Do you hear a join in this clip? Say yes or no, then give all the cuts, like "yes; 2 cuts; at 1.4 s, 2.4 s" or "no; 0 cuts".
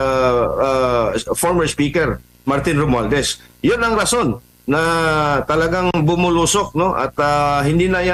no; 0 cuts